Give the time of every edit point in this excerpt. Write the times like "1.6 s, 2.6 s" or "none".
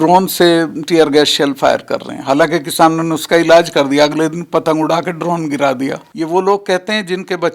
6.0 s